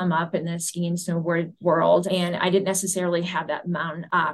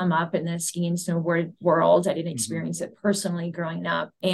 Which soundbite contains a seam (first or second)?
first